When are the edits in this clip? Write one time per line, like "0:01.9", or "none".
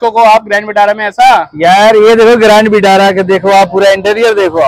none